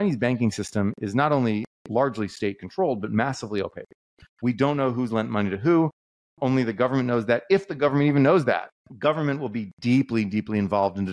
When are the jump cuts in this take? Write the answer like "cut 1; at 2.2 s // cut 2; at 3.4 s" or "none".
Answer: cut 1; at 8.8 s